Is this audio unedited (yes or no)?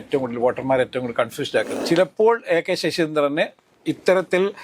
no